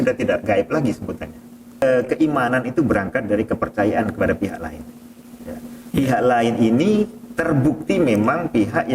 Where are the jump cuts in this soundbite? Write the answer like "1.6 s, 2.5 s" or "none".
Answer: 1.8 s